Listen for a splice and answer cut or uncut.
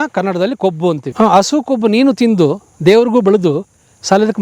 cut